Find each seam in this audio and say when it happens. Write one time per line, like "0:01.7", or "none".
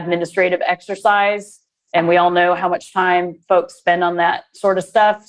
none